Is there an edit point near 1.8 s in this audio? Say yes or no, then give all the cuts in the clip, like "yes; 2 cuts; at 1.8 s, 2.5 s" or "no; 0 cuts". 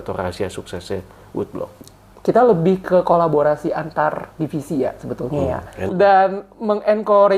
yes; 2 cuts; at 1.8 s, 5.9 s